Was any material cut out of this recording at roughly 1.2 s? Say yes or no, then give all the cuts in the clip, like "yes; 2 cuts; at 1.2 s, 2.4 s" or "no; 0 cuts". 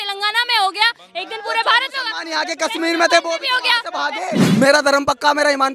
no; 1 cut; at 4.4 s